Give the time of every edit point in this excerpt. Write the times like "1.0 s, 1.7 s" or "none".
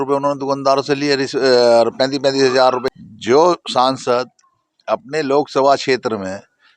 2.9 s